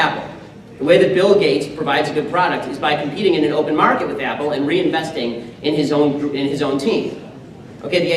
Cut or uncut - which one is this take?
cut